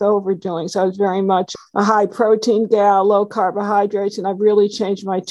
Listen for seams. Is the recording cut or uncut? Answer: cut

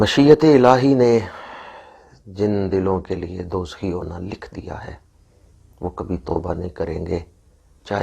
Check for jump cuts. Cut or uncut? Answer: uncut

